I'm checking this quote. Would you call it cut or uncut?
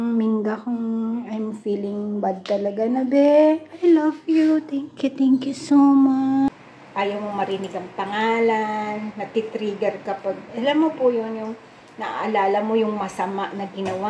cut